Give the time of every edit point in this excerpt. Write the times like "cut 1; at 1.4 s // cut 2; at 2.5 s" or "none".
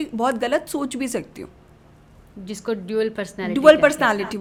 none